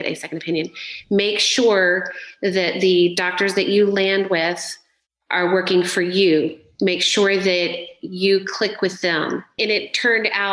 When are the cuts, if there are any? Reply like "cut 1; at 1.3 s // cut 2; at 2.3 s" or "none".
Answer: cut 1; at 9.6 s